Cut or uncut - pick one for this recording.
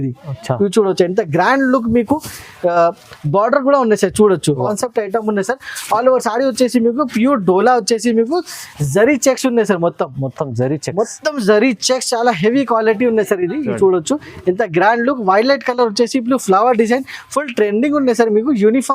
cut